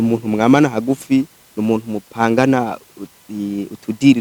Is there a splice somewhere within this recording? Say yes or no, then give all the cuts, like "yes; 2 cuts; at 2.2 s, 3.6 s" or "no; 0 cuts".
no; 0 cuts